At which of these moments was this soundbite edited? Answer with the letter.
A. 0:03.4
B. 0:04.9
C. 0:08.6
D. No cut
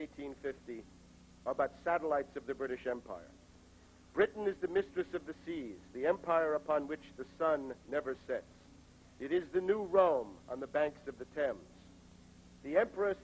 C